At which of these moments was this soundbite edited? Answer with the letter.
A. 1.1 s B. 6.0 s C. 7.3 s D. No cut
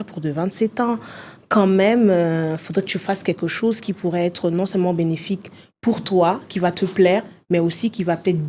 D